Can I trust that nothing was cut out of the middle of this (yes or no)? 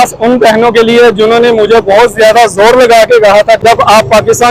yes